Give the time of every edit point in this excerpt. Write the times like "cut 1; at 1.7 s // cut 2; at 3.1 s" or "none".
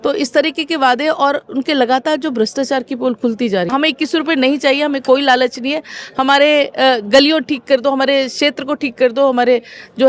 cut 1; at 3.7 s